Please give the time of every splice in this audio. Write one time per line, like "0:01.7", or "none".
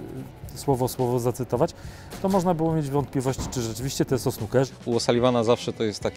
0:04.7